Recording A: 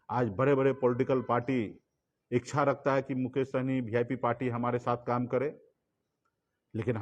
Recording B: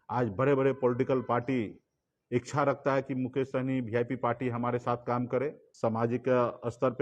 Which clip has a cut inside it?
B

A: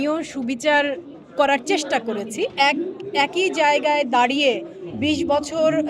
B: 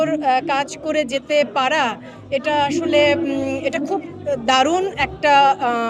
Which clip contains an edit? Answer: A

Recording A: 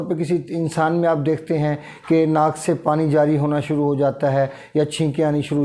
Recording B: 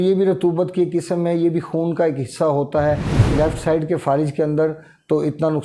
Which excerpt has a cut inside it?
B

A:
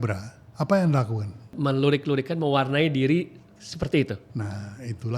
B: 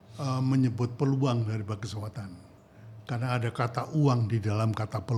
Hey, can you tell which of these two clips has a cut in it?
A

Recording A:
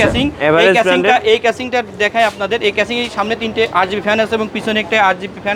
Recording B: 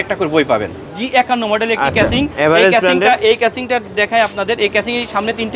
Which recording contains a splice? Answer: B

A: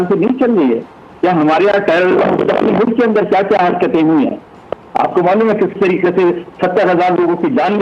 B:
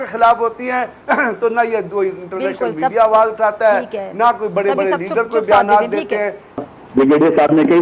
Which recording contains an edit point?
B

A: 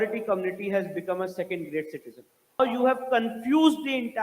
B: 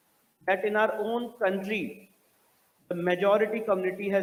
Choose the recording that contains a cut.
A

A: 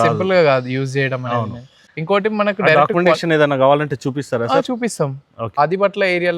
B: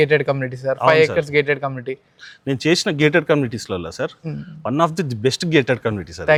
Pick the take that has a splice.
A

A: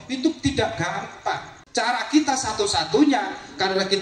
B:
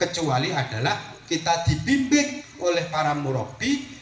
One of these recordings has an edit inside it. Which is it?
A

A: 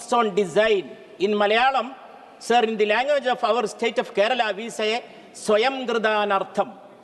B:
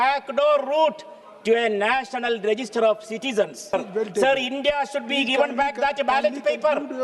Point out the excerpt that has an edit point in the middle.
B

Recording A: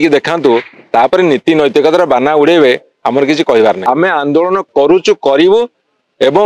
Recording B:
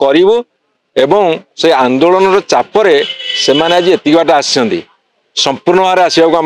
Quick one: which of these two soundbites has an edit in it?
A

